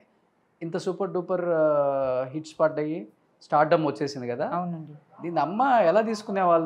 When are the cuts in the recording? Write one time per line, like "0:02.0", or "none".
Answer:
none